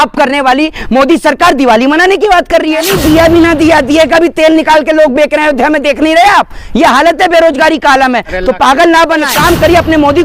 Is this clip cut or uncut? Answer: cut